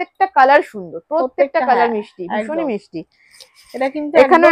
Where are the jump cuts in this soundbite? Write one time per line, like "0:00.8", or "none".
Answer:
none